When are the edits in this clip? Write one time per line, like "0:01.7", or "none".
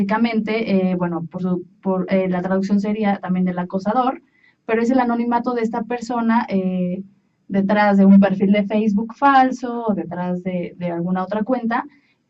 none